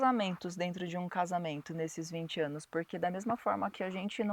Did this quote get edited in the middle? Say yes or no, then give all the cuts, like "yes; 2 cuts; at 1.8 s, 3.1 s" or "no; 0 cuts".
no; 0 cuts